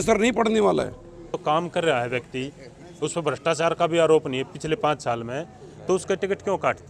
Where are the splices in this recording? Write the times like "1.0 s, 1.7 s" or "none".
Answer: 1.3 s